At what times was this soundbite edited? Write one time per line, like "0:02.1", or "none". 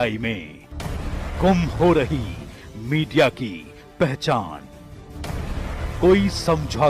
none